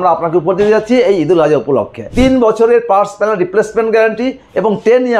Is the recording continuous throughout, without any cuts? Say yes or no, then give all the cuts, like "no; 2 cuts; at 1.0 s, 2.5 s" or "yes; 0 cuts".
no; 1 cut; at 2.1 s